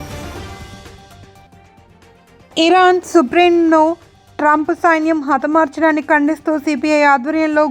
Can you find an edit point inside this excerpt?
yes; 1 cut; at 1.2 s

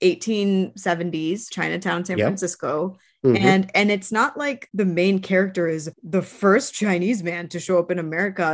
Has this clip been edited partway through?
yes; 3 cuts; at 1.5 s, 4.6 s, 5.9 s

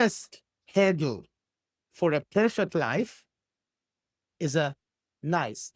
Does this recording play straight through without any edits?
yes; 0 cuts

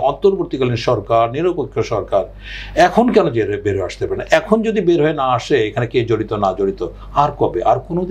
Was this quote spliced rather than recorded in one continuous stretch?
no; 0 cuts

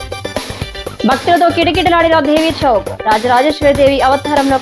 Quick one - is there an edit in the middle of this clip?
yes; 1 cut; at 1.0 s

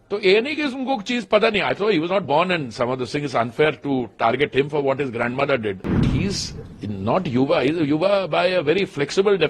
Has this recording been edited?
yes; 1 cut; at 6.0 s

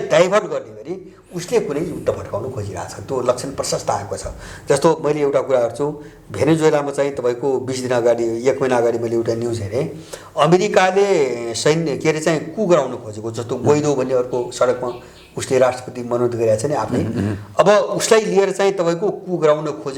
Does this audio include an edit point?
no; 0 cuts

